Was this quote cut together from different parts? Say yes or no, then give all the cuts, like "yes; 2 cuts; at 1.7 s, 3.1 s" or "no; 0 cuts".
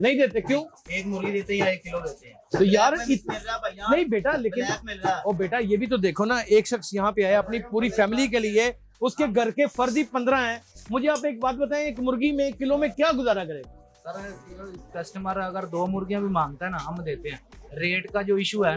no; 0 cuts